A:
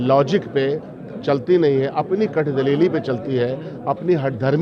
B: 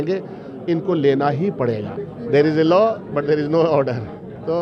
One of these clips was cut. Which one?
B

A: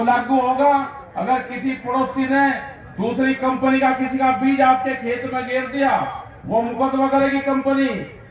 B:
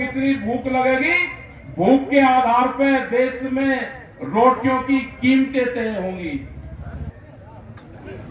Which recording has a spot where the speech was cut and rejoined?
B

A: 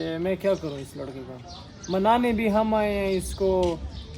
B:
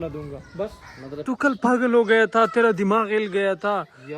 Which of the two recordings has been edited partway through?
B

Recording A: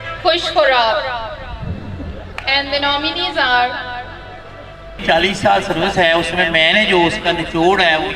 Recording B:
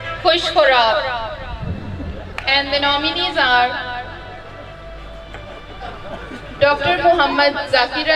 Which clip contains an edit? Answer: A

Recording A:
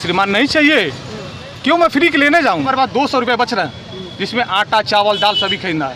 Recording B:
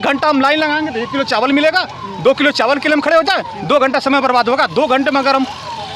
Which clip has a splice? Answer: A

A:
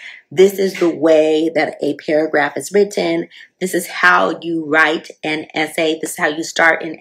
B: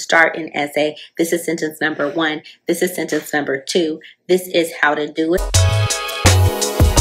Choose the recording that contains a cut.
B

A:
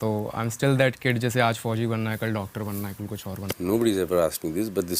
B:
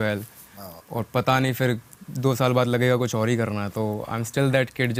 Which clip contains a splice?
A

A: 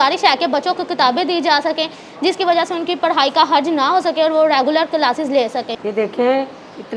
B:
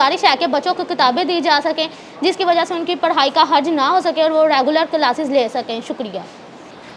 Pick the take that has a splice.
A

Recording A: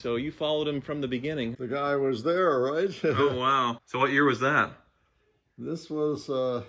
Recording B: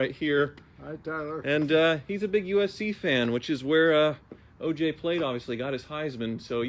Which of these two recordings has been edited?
A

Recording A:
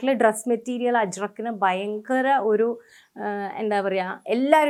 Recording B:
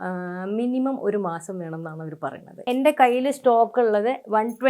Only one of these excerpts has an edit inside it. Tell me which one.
B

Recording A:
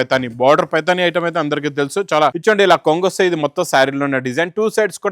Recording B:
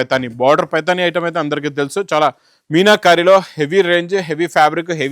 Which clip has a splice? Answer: A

